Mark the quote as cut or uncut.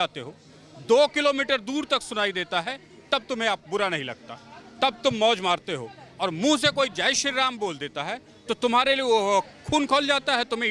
uncut